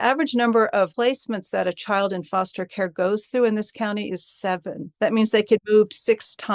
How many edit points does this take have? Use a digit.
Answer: 3